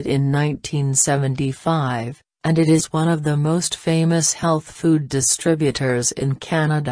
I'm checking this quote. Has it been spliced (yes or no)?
yes